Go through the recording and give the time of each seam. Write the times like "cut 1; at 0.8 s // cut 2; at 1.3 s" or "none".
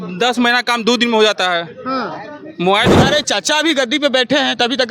cut 1; at 2.9 s